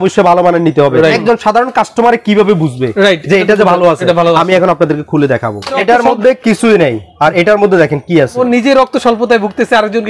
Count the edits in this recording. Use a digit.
3